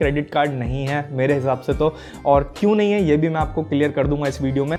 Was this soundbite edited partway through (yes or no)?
no